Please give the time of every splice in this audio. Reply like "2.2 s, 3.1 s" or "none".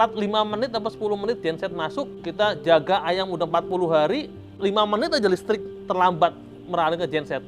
2.1 s, 4.5 s